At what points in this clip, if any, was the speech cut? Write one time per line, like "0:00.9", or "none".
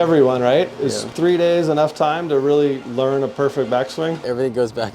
0:01.0
0:02.8
0:04.2